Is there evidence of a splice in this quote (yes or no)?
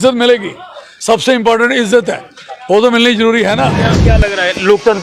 yes